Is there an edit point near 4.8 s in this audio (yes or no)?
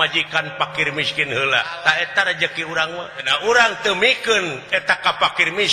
no